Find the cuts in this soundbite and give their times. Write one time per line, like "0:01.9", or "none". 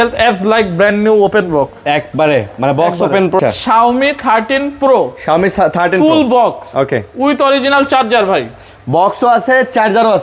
0:03.4